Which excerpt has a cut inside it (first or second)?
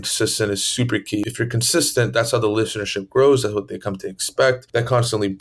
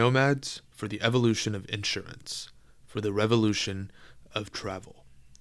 first